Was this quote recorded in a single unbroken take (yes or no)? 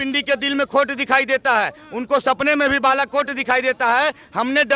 yes